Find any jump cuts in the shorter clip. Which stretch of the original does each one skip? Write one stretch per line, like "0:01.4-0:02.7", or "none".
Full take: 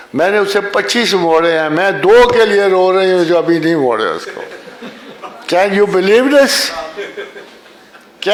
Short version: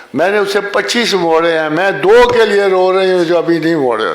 none